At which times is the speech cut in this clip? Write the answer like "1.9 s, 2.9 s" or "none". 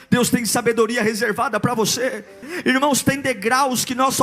2.5 s